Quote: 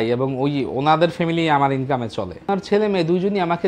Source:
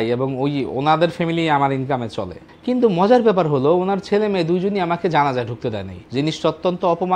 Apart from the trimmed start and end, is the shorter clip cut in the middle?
yes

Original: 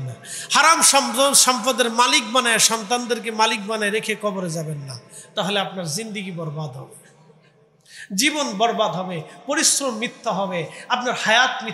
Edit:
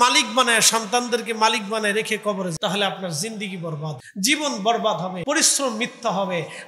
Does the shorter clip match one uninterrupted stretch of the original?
no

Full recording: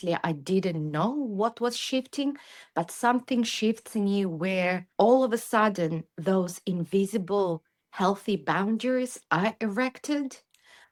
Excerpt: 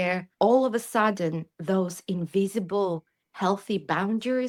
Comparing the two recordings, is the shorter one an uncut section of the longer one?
yes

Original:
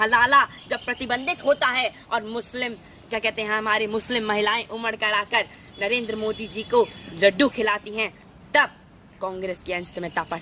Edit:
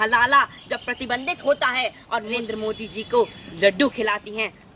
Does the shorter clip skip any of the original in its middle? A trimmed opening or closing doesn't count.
yes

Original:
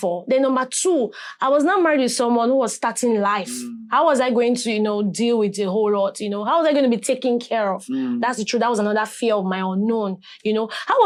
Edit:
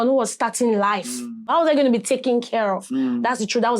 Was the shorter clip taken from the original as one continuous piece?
no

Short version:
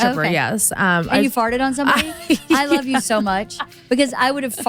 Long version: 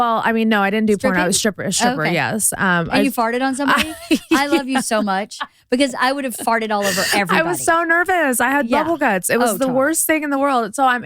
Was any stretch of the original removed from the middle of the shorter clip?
no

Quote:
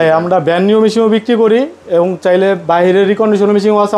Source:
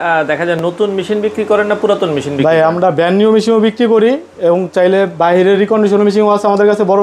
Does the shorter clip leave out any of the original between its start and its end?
no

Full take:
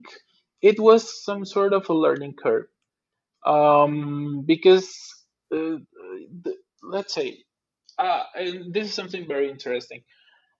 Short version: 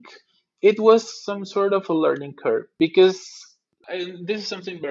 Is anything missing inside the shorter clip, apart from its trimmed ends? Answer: yes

